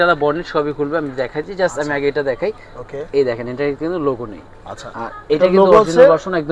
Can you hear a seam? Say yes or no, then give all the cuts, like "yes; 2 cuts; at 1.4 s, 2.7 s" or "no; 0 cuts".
no; 0 cuts